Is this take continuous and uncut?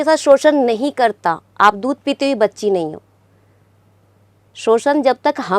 yes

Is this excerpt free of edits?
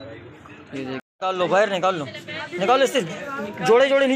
no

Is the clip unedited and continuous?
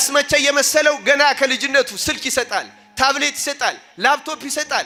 yes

